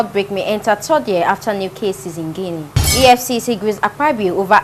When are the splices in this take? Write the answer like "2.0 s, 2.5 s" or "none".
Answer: 2.8 s

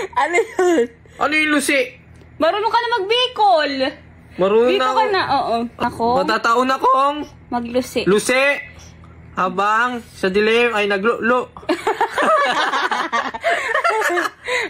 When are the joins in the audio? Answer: 5.8 s

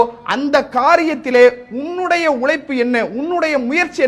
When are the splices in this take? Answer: none

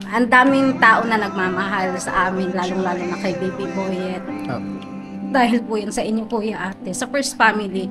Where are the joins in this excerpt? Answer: none

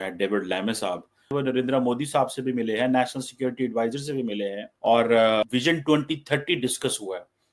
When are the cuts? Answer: 1.2 s, 4.7 s, 5.4 s

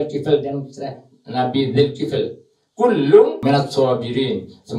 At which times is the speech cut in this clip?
3.4 s

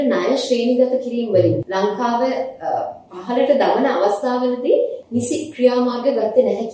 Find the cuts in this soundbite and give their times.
1.6 s, 5.0 s

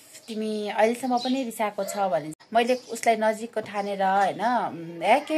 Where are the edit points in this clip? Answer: 2.4 s

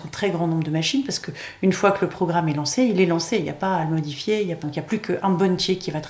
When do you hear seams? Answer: 4.6 s

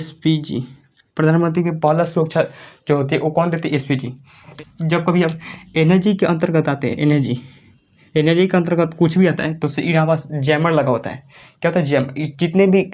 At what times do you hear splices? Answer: 4.5 s

